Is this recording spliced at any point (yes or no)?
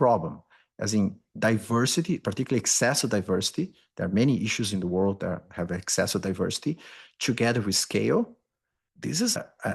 no